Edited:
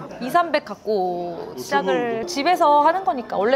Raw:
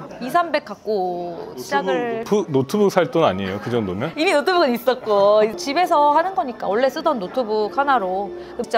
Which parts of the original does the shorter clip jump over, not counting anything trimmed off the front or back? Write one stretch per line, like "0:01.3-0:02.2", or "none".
0:02.2-0:05.5